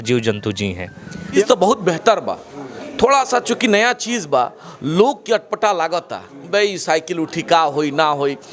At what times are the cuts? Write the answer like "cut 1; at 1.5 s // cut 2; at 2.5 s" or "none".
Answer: cut 1; at 1.4 s